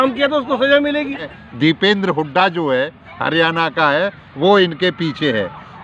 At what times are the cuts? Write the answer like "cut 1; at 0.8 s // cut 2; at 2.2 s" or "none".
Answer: cut 1; at 1.3 s